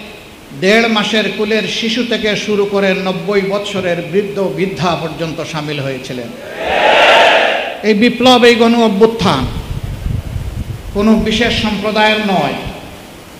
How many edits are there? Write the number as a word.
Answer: one